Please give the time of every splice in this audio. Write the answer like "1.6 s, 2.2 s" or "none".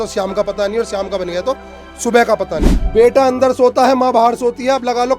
2.8 s